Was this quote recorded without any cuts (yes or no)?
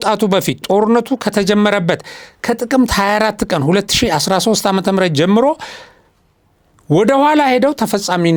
yes